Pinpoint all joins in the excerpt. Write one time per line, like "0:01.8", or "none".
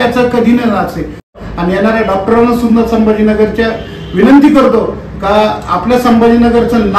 0:01.3